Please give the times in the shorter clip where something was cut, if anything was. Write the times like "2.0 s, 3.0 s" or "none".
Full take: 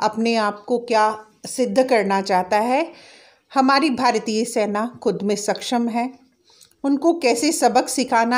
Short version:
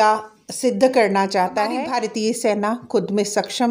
1.8 s